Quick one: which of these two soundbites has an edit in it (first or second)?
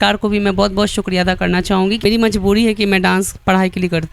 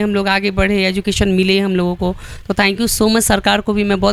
first